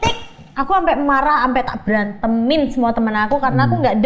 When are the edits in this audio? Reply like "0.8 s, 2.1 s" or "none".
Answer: none